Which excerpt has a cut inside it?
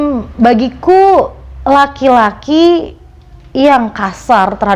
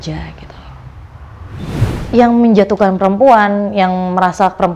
second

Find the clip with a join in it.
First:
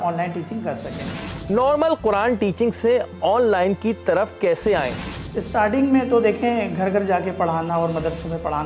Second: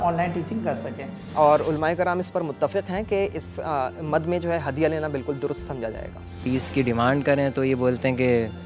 second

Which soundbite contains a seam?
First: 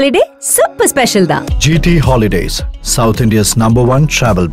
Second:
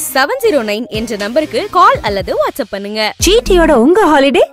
second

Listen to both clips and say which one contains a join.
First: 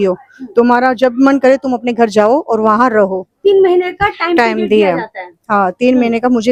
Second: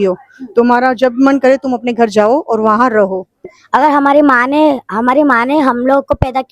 second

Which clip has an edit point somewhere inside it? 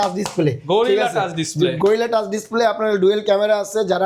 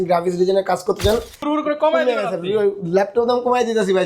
second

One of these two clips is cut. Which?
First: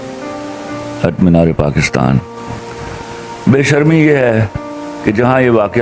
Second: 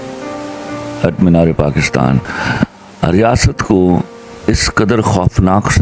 second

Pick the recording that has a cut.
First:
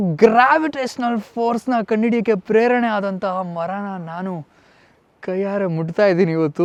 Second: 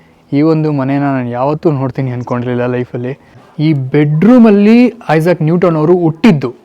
second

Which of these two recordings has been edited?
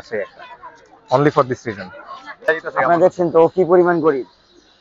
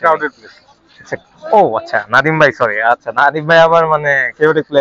first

